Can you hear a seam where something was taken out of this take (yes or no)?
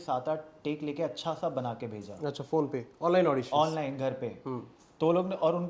no